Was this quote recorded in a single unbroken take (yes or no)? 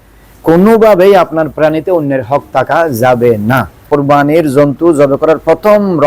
no